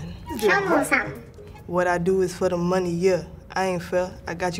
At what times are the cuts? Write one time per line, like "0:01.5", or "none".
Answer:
0:02.5